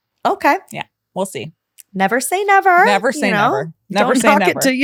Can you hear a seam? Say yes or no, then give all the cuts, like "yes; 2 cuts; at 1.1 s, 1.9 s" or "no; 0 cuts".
no; 0 cuts